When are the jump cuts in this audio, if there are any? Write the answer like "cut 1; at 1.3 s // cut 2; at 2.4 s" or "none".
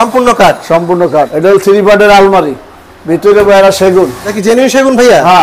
cut 1; at 1.3 s // cut 2; at 4.3 s